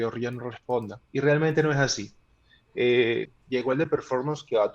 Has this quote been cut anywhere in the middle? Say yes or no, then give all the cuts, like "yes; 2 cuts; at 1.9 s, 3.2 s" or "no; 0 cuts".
yes; 2 cuts; at 1.0 s, 3.3 s